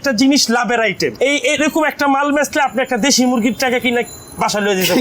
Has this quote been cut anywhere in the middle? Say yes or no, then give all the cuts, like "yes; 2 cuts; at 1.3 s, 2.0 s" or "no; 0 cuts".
yes; 1 cut; at 1.1 s